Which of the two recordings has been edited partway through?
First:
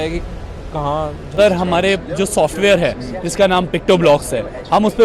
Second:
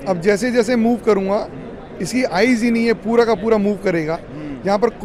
first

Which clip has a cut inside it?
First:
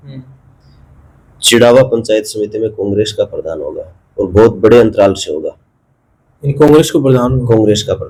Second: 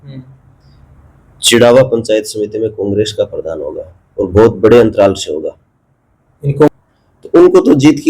second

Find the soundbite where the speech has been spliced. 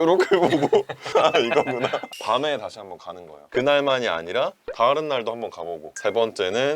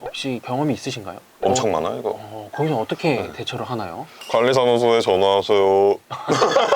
first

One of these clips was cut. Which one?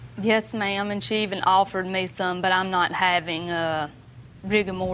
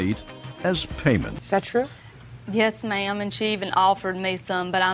second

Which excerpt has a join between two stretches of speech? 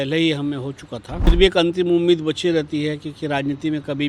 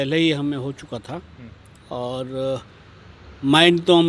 first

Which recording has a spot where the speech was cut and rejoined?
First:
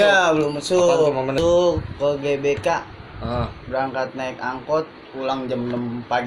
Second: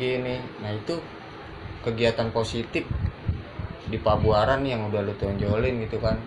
first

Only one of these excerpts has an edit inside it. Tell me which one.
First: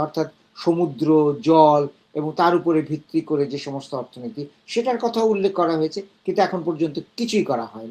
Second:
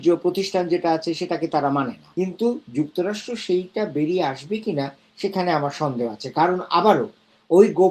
second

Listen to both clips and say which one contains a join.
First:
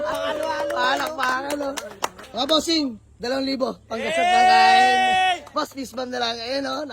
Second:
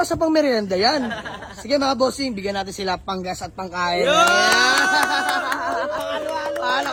first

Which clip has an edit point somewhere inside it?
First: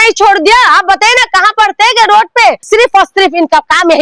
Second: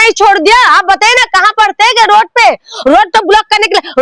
first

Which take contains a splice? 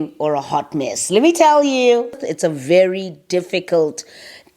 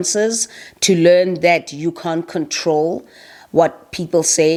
first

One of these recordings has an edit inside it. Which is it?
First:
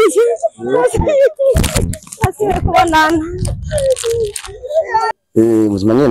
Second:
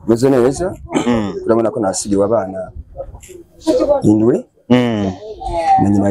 first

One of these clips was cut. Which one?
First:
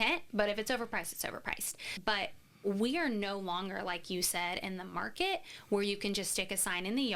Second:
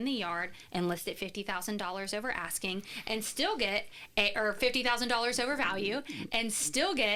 first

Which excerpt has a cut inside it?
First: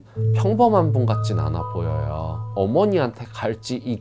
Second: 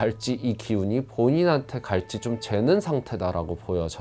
first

